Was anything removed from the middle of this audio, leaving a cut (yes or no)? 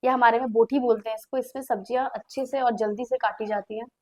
no